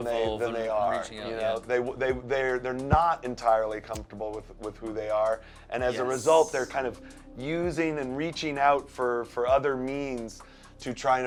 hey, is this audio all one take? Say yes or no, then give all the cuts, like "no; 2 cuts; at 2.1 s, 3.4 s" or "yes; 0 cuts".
yes; 0 cuts